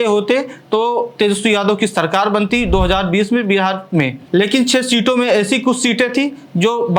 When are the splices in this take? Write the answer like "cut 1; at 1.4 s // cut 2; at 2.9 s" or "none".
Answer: none